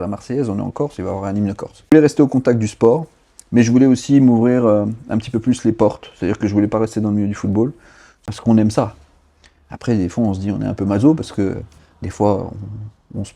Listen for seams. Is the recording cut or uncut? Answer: cut